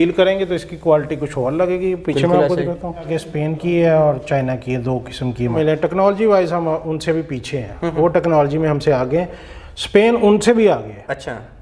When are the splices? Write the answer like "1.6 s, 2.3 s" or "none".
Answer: 3.2 s, 5.5 s